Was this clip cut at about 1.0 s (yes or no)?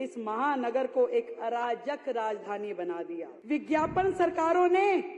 no